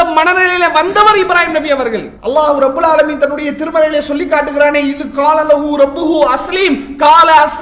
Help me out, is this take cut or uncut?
cut